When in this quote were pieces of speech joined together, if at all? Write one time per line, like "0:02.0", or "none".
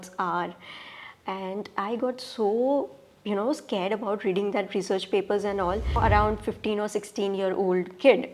0:06.0